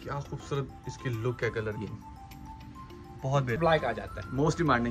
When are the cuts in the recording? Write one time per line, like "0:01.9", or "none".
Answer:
0:03.6